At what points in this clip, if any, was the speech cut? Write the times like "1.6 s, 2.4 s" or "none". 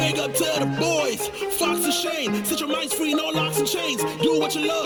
none